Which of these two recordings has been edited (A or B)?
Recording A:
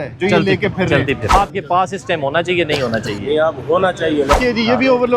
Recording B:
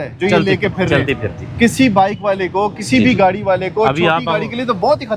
A